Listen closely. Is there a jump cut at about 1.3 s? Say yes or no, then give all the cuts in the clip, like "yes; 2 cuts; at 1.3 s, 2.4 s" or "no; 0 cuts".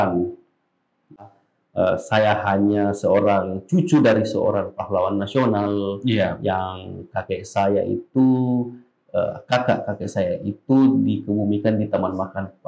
yes; 1 cut; at 1.3 s